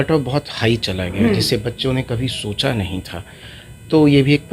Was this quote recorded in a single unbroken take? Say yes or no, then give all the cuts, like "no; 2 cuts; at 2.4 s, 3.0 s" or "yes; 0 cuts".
yes; 0 cuts